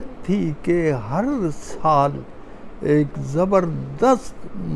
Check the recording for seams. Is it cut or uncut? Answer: uncut